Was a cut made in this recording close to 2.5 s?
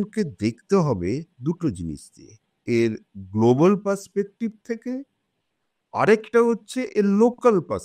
yes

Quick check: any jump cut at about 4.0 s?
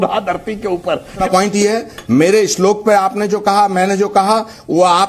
no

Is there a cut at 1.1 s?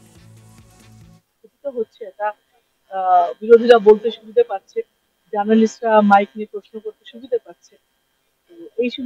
yes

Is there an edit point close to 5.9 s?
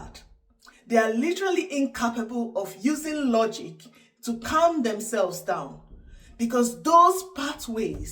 no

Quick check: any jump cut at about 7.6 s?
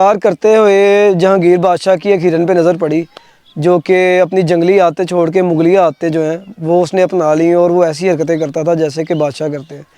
no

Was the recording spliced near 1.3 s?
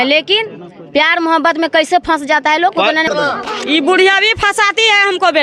no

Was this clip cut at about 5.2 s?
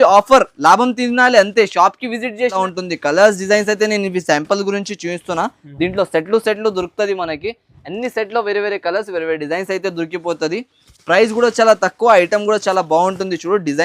no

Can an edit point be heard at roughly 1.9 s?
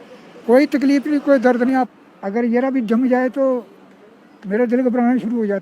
yes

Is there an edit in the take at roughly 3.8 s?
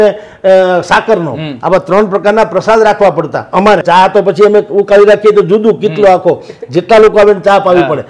yes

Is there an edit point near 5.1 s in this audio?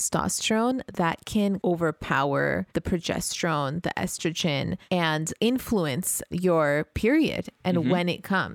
yes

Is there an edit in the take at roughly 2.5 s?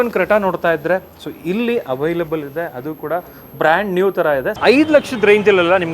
no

